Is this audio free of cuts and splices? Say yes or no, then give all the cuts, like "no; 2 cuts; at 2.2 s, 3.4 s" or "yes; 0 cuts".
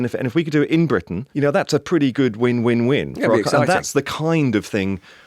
no; 1 cut; at 1.2 s